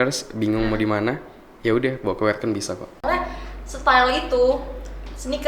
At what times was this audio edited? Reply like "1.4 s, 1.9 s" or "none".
2.9 s